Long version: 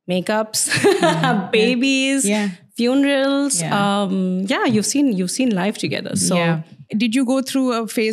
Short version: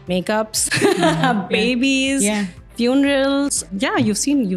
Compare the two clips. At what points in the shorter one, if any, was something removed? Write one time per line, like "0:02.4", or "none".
0:03.7